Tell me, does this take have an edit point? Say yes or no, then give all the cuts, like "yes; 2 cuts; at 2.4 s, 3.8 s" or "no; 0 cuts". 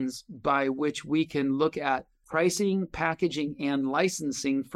yes; 1 cut; at 2.2 s